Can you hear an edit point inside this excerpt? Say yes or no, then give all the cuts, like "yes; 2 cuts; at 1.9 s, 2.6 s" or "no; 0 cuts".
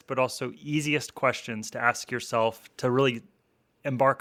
no; 0 cuts